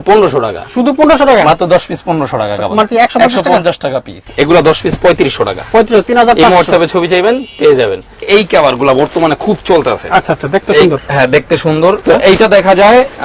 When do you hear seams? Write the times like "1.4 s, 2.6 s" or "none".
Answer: 4.1 s, 8.3 s, 12.0 s